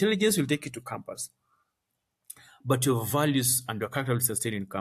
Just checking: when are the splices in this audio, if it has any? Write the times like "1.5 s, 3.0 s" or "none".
none